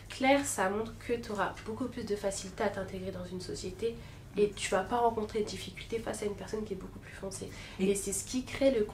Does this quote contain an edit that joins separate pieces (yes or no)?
no